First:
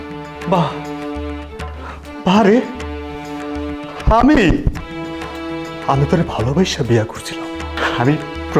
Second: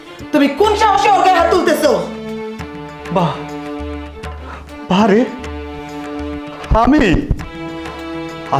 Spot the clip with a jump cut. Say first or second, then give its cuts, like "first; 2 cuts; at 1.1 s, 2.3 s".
first; 1 cut; at 7.7 s